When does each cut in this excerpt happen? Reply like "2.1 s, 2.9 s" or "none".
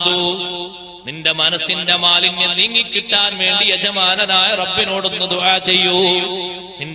none